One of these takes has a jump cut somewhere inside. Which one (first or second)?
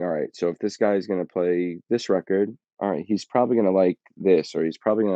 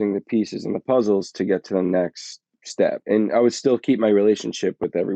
second